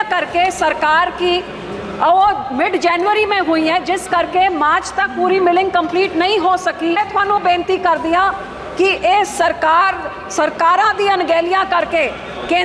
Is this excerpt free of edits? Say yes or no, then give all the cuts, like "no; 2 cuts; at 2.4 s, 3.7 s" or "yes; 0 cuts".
no; 1 cut; at 7.0 s